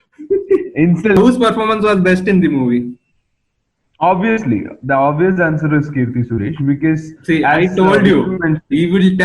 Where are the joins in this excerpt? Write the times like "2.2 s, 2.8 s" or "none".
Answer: 1.2 s

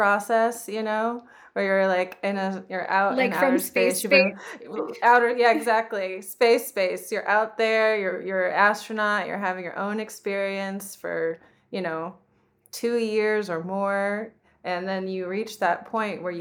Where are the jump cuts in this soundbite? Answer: none

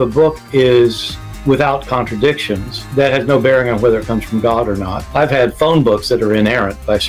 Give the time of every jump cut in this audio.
none

